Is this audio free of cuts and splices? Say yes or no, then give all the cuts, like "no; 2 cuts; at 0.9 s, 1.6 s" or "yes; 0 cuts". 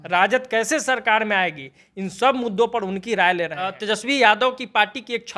no; 1 cut; at 3.8 s